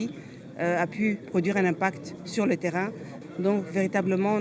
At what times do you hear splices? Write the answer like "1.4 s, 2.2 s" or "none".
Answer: 3.1 s